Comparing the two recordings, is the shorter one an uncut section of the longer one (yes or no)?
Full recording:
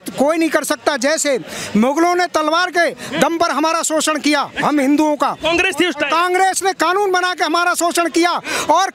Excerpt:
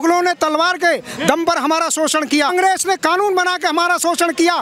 no